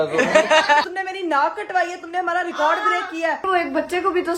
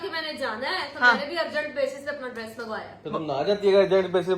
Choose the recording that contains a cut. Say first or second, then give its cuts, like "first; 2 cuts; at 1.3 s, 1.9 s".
first; 2 cuts; at 0.8 s, 3.4 s